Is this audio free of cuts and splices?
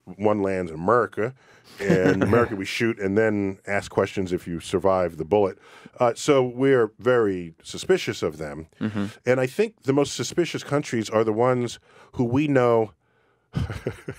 no; 1 cut; at 1.8 s

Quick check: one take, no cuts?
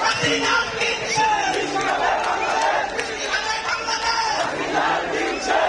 yes; 0 cuts

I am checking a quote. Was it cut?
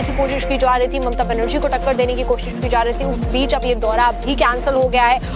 yes; 1 cut; at 1.5 s

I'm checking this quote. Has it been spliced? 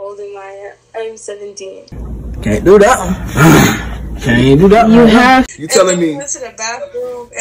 yes; 1 cut; at 5.6 s

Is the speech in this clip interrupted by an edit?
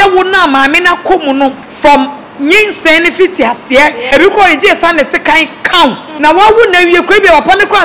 yes; 3 cuts; at 1.7 s, 4.0 s, 6.1 s

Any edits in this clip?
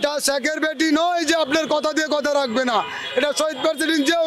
no; 0 cuts

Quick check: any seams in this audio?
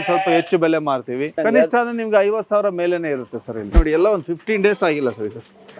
yes; 2 cuts; at 1.3 s, 3.8 s

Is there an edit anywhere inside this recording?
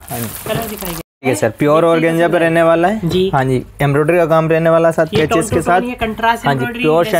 yes; 1 cut; at 1.1 s

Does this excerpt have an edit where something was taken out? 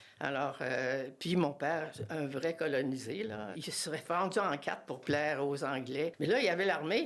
yes; 2 cuts; at 3.5 s, 6.1 s

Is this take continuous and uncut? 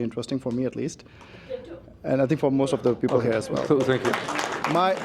yes; 0 cuts

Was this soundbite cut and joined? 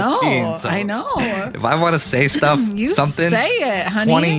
no; 0 cuts

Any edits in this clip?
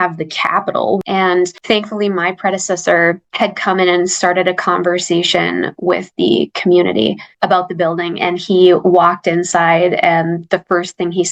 yes; 1 cut; at 1.2 s

